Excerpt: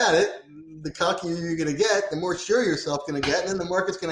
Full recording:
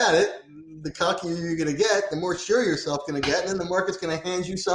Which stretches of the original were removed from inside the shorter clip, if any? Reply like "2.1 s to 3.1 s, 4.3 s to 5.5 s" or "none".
none